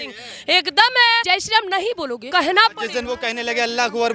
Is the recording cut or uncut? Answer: cut